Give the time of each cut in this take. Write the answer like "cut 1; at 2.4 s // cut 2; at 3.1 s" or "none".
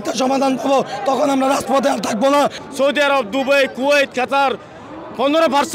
cut 1; at 2.6 s